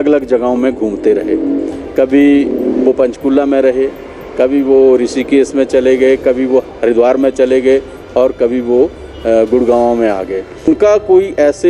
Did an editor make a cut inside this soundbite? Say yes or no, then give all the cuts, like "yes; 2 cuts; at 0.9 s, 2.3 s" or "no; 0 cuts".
yes; 2 cuts; at 6.7 s, 10.7 s